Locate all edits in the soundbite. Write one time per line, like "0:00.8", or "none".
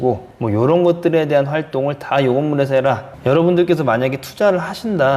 0:03.1